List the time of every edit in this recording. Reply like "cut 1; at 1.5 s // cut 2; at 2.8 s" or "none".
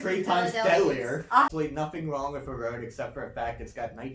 cut 1; at 1.5 s